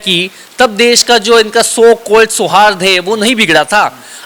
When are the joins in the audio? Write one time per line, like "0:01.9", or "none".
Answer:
none